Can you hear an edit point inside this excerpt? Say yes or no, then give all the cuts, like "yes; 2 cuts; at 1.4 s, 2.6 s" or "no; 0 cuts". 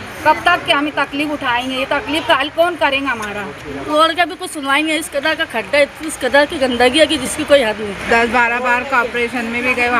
yes; 2 cuts; at 3.6 s, 7.9 s